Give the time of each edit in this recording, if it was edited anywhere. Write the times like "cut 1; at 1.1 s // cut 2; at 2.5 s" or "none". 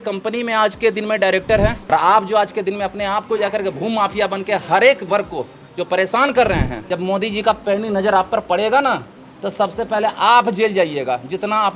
cut 1; at 1.9 s // cut 2; at 6.8 s